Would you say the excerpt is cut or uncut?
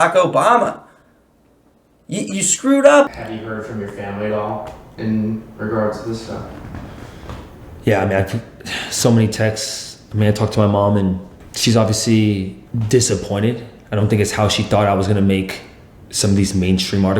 uncut